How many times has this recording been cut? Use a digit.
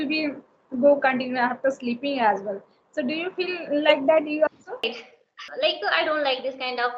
1